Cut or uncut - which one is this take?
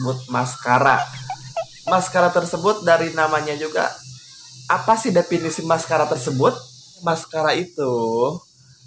cut